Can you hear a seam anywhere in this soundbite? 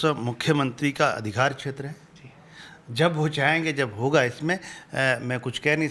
no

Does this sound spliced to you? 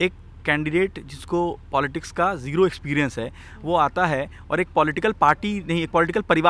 no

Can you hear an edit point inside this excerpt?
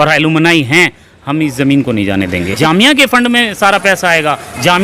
yes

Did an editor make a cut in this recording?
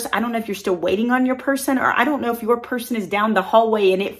no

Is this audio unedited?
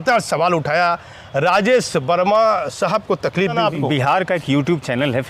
no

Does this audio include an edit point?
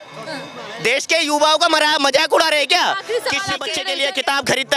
yes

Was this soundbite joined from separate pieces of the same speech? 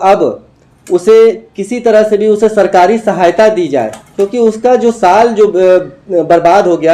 no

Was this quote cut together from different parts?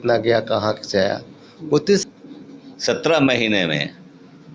yes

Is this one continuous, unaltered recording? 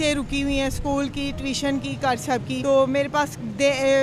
no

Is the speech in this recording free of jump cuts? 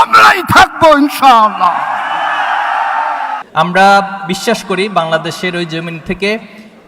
no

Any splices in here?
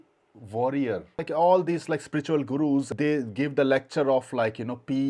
yes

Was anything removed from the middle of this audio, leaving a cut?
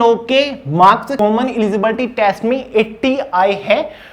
yes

